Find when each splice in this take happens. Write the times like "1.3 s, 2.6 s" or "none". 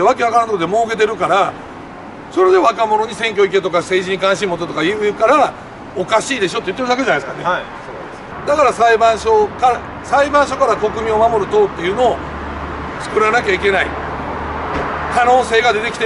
8.3 s